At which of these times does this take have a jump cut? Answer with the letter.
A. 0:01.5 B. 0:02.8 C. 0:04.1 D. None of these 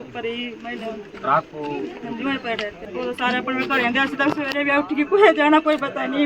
B